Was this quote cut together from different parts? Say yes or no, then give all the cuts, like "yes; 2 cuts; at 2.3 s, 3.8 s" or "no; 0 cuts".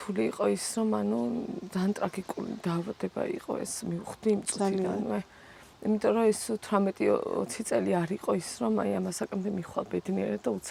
no; 0 cuts